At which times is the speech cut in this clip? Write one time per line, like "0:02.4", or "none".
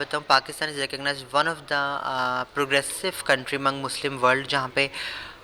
none